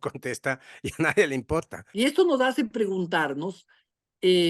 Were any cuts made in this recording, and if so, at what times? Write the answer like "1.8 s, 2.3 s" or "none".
1.8 s